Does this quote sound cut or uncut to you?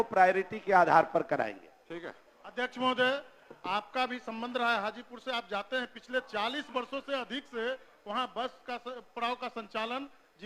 uncut